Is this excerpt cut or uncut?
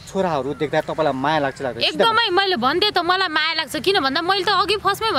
uncut